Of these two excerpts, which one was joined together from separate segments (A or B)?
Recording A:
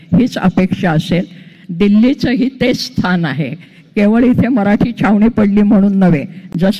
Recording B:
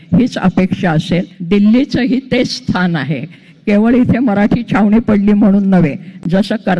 B